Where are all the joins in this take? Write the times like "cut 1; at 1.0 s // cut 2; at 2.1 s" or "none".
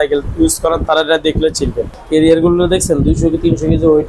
cut 1; at 1.9 s